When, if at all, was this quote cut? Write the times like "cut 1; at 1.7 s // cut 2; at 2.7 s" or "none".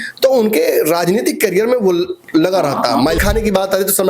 cut 1; at 3.2 s